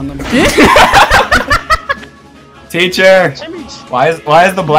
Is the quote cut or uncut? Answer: cut